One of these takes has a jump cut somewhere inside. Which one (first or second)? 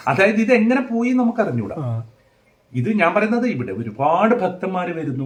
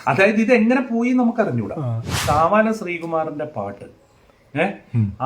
second